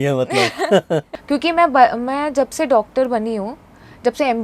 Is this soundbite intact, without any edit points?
no; 1 cut; at 1.1 s

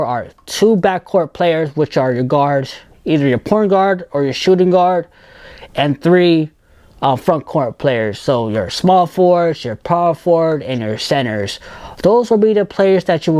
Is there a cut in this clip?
no; 0 cuts

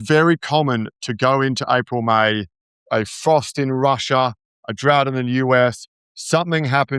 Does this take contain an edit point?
yes; 1 cut; at 2.8 s

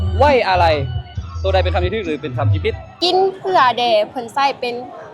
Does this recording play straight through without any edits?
no; 1 cut; at 2.9 s

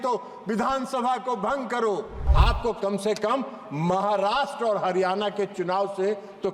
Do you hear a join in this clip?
yes; 1 cut; at 2.3 s

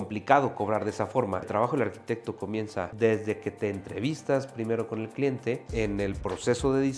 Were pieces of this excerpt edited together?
yes; 3 cuts; at 1.5 s, 2.9 s, 5.7 s

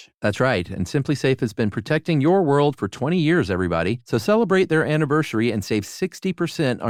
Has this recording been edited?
no; 0 cuts

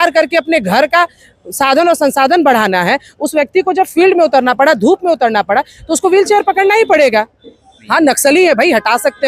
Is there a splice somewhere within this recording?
yes; 1 cut; at 7.8 s

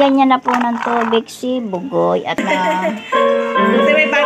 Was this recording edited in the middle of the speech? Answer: yes; 1 cut; at 2.4 s

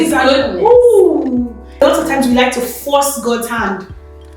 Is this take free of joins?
no; 1 cut; at 1.8 s

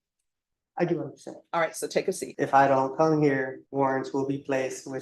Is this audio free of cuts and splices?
no; 2 cuts; at 2.3 s, 3.6 s

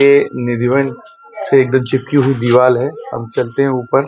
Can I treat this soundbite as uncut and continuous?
yes; 0 cuts

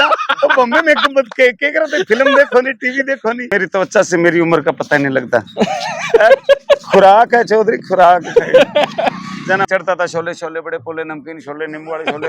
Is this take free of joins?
no; 2 cuts; at 3.5 s, 9.6 s

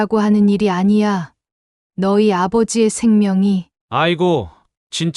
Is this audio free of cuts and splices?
yes; 0 cuts

